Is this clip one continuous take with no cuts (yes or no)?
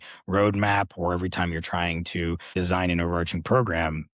yes